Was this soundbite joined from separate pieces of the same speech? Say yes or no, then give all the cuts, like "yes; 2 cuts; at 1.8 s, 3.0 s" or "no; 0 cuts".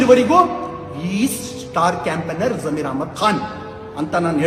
no; 0 cuts